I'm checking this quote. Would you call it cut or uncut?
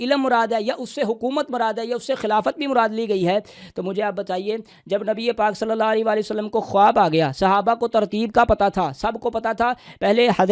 uncut